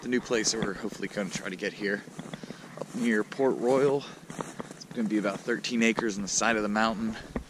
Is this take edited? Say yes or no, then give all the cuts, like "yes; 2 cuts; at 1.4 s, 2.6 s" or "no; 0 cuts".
no; 0 cuts